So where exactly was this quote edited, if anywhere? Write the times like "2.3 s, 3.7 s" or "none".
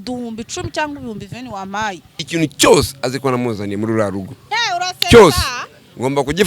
2.1 s